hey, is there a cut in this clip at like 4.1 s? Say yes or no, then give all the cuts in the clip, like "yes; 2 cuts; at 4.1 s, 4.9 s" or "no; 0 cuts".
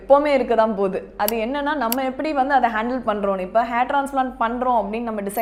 no; 0 cuts